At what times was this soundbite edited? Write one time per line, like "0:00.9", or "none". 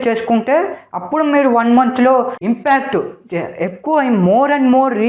0:02.3